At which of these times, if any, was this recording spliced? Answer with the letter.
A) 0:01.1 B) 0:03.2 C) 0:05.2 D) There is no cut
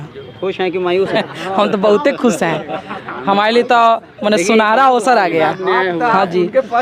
A